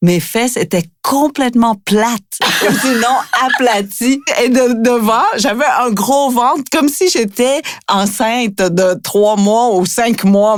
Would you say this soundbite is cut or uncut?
uncut